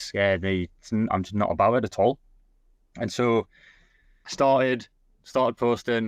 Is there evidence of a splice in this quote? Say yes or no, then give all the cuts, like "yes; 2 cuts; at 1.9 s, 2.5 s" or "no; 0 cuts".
no; 0 cuts